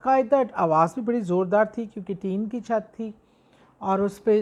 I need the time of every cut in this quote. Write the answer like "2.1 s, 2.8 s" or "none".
none